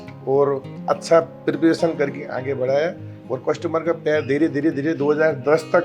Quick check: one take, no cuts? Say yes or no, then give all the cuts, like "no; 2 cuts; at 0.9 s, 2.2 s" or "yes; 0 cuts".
yes; 0 cuts